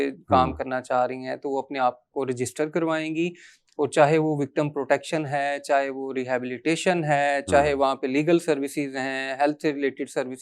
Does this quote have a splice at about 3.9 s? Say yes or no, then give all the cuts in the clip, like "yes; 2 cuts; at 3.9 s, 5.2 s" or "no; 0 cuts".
no; 0 cuts